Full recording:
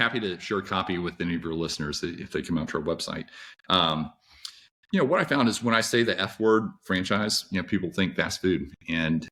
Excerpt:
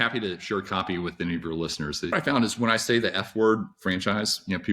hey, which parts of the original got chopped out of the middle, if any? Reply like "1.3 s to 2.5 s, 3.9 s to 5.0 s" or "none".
2.1 s to 5.2 s